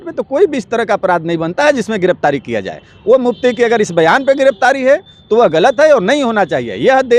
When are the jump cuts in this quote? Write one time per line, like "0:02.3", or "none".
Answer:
none